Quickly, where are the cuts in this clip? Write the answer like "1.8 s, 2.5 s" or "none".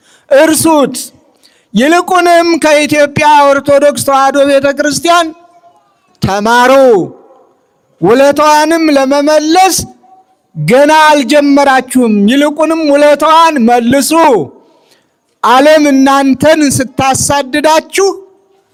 none